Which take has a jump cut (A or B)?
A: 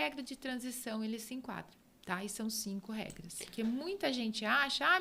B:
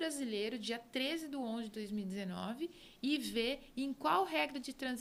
A